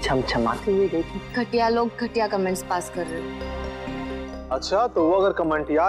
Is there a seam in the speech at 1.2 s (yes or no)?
yes